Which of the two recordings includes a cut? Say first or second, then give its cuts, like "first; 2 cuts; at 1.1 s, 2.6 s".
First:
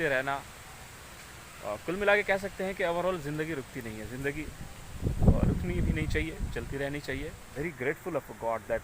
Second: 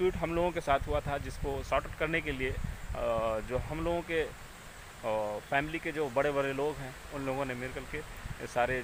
first; 1 cut; at 7.5 s